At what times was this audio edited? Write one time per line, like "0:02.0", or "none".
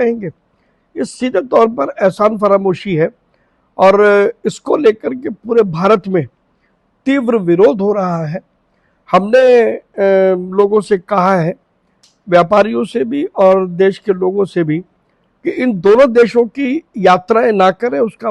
none